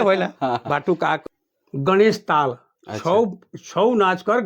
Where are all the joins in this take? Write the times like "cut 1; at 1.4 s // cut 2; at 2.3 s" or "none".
cut 1; at 1.2 s